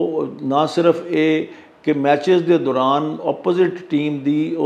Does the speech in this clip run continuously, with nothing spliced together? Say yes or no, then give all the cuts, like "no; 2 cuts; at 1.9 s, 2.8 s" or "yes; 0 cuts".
yes; 0 cuts